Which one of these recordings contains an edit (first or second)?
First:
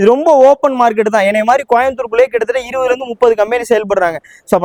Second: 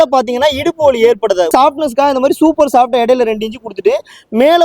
second